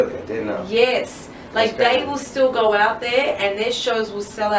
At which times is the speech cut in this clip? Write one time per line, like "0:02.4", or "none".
0:02.3